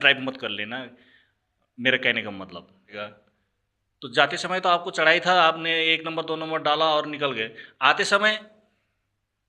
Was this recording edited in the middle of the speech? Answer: yes; 1 cut; at 2.9 s

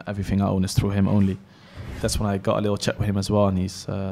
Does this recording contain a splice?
yes; 1 cut; at 1.8 s

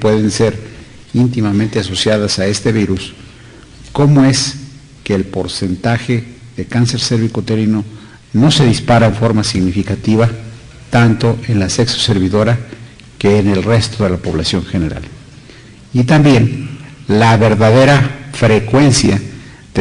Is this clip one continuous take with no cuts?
yes; 0 cuts

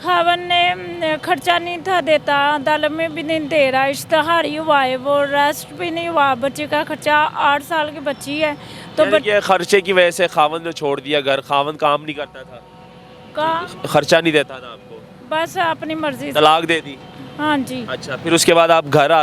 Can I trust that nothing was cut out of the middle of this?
yes; 0 cuts

